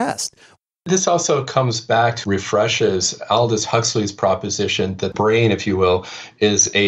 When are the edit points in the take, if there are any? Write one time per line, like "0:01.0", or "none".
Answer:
0:00.9
0:02.2
0:05.1